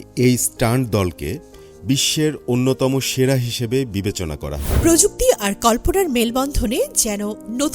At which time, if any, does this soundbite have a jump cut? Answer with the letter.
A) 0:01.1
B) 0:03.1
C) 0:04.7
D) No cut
C